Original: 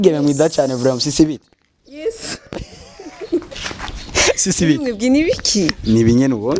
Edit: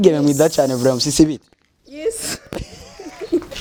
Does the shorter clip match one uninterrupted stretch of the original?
yes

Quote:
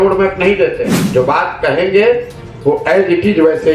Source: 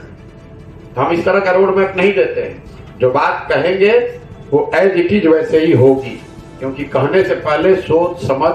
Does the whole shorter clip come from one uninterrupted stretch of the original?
no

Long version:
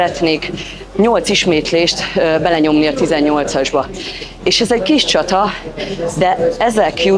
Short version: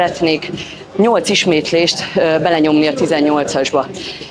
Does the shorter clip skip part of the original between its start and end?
no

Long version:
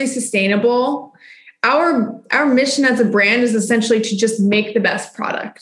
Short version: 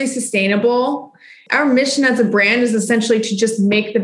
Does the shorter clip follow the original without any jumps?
no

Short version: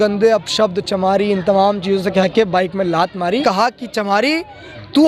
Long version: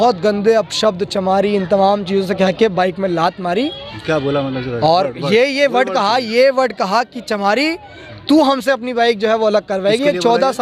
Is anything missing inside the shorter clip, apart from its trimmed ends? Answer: yes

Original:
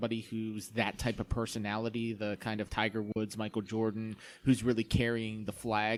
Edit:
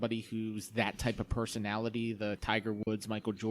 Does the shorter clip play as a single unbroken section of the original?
no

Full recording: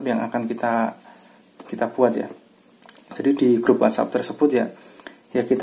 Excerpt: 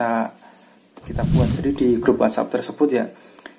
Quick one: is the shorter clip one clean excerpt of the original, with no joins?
no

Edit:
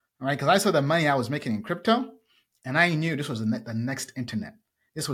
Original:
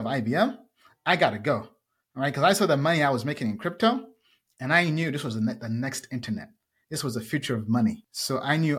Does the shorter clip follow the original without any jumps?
yes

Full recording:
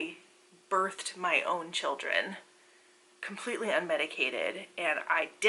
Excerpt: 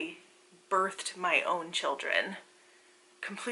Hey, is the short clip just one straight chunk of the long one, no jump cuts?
yes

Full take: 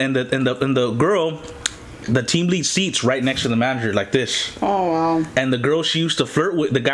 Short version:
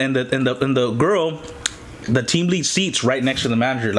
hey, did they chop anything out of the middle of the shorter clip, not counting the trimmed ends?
no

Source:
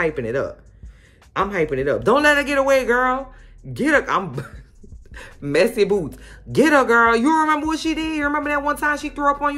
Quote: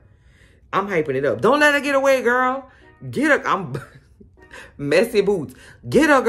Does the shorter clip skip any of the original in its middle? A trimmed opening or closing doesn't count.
no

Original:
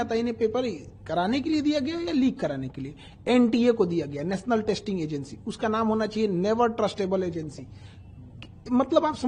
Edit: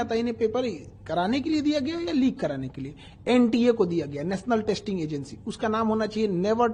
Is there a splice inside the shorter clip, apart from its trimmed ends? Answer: no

